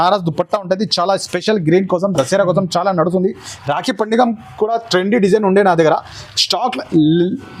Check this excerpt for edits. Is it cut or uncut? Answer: uncut